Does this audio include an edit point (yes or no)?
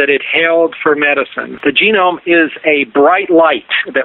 yes